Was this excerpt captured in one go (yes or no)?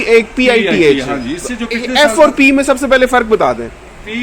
yes